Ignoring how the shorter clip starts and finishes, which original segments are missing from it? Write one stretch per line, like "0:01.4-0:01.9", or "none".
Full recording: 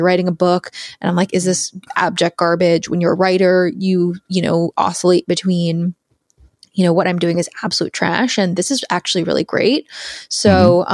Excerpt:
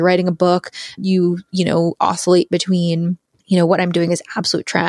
0:01.0-0:03.7
0:06.1-0:06.6